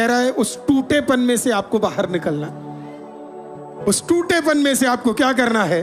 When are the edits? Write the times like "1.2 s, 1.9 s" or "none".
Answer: none